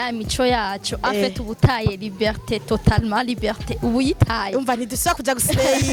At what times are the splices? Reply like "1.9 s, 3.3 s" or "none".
none